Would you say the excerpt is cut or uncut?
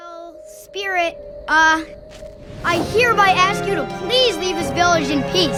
uncut